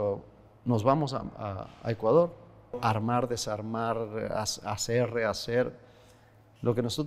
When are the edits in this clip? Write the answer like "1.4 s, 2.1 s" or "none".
2.8 s